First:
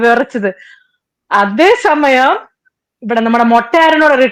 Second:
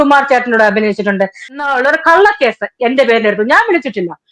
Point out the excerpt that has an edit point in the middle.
second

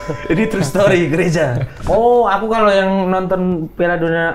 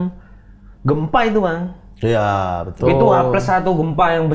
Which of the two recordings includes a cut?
first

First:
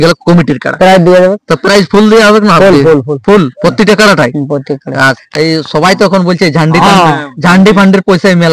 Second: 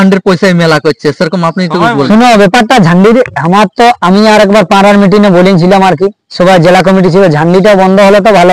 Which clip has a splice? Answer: first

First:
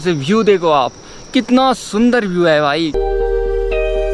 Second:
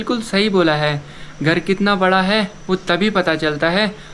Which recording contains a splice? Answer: first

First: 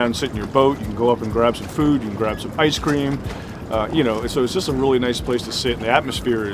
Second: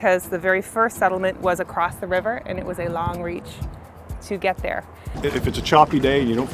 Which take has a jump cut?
second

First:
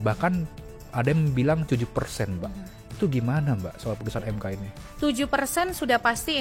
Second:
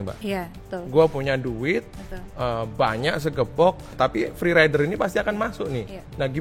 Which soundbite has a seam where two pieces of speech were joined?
second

